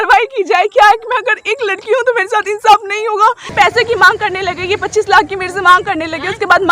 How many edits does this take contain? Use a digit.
1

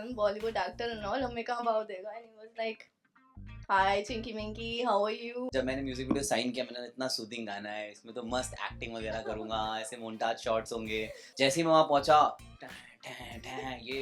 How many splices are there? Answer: 2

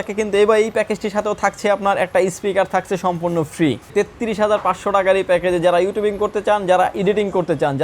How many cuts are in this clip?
1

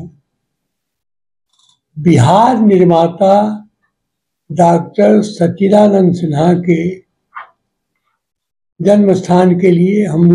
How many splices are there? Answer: 0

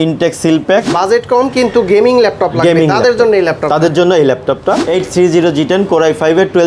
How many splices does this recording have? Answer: 2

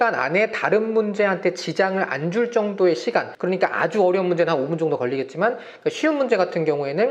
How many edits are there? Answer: 1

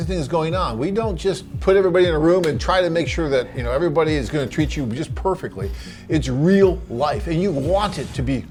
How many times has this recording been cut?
0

